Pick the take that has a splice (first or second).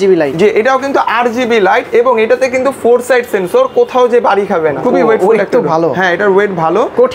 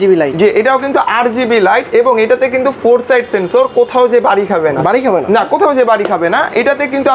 first